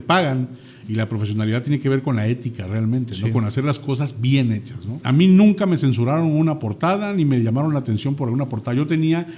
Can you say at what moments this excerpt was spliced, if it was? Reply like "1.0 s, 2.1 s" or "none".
4.9 s